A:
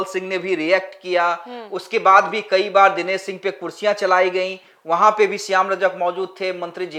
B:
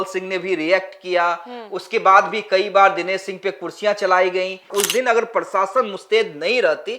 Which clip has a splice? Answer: B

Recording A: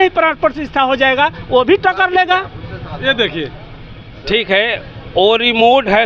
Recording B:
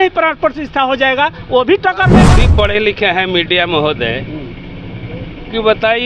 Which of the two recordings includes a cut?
B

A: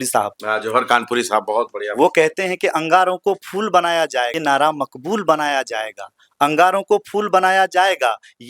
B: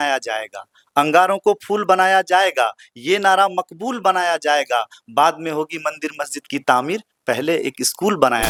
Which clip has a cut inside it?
A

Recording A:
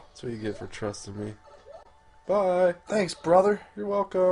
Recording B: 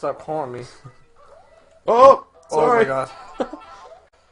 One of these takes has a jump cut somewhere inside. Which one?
A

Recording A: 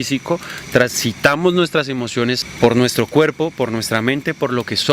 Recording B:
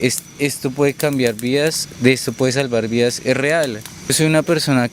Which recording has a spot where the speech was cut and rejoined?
A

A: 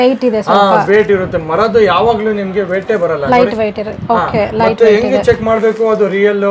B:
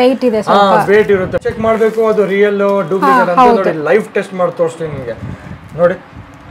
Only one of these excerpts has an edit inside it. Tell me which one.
B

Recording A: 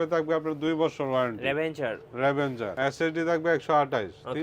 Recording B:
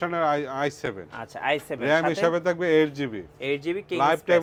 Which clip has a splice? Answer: A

